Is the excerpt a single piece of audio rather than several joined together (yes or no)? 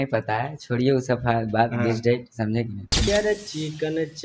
no